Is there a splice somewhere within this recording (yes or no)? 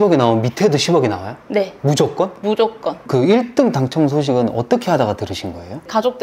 yes